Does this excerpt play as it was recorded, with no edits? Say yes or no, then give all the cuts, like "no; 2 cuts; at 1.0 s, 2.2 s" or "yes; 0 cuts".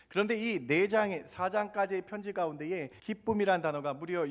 no; 1 cut; at 2.9 s